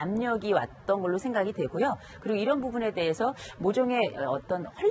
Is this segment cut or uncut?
uncut